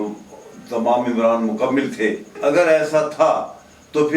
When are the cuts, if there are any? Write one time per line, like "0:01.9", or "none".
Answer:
0:02.3